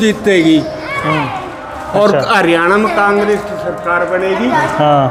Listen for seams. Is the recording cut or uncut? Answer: uncut